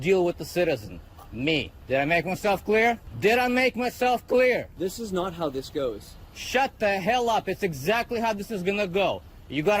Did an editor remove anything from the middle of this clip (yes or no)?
yes